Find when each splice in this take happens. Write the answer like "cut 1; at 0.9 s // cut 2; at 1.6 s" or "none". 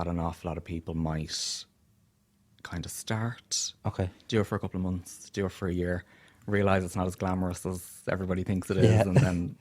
none